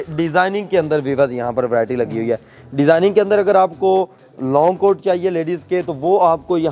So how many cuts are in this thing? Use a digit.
0